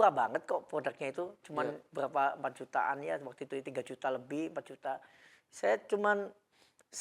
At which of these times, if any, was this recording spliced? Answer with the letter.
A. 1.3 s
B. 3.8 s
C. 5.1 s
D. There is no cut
D